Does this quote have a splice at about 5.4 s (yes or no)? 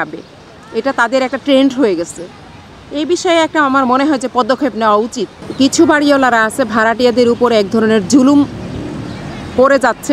yes